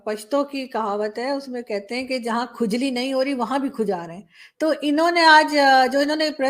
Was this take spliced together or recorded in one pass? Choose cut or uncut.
uncut